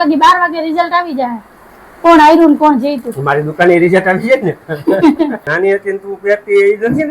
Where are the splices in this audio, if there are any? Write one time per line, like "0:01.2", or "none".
0:05.5